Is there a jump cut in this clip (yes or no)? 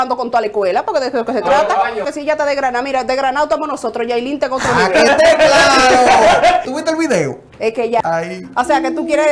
yes